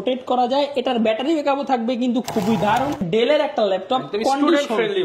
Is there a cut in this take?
yes; 1 cut; at 3.0 s

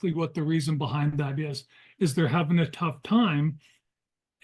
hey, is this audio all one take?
yes; 0 cuts

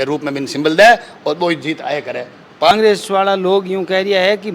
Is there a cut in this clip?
yes; 1 cut; at 2.7 s

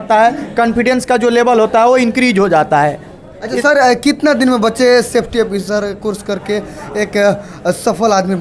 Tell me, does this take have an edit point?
no; 0 cuts

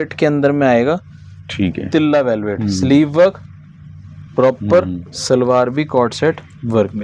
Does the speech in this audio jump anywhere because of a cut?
no; 0 cuts

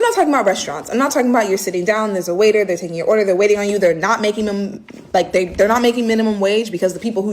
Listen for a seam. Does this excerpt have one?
no; 0 cuts

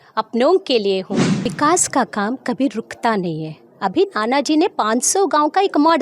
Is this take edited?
yes; 1 cut; at 1.3 s

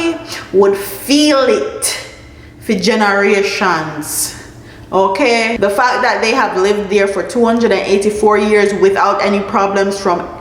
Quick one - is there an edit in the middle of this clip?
yes; 1 cut; at 5.5 s

